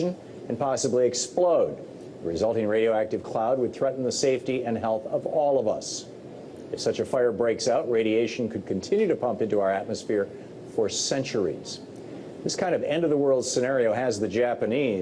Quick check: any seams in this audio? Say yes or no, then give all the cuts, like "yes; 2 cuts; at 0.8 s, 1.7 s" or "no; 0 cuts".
no; 0 cuts